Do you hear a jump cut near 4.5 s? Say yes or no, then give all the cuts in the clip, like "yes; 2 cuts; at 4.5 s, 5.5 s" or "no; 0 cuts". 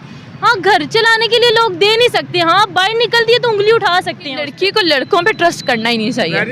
yes; 1 cut; at 4.5 s